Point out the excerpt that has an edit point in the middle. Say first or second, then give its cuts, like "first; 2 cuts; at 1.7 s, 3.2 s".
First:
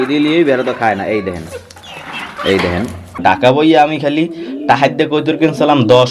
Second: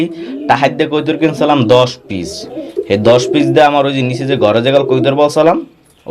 first; 1 cut; at 3.2 s